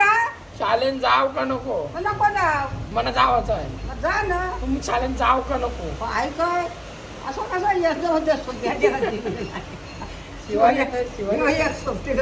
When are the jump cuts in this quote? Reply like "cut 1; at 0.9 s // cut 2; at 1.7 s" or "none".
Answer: none